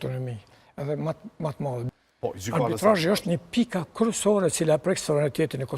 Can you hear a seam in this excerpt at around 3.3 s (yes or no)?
no